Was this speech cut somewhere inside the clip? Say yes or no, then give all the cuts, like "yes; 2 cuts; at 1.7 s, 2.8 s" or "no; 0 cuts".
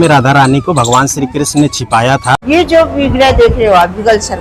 yes; 1 cut; at 2.4 s